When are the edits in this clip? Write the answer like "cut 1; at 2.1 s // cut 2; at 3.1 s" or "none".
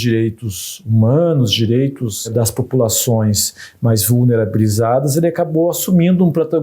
cut 1; at 2.3 s